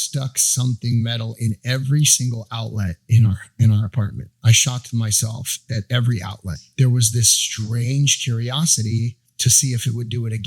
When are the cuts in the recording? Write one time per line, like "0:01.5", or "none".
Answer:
0:04.3
0:05.6
0:06.4
0:09.6